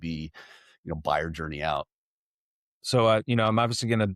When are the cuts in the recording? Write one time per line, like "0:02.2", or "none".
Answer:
none